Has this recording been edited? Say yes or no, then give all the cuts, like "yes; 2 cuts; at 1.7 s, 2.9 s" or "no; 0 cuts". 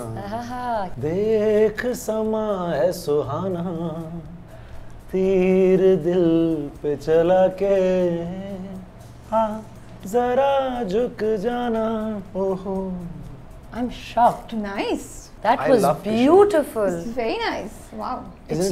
yes; 2 cuts; at 0.9 s, 15.2 s